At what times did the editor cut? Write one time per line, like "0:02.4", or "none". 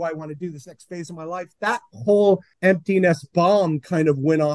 0:02.5